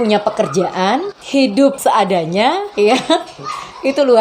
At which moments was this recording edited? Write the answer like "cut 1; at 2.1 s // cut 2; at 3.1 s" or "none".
cut 1; at 1.8 s // cut 2; at 2.7 s